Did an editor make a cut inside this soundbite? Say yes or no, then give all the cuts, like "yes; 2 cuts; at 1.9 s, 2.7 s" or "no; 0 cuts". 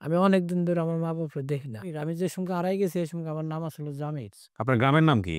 yes; 2 cuts; at 2.0 s, 4.4 s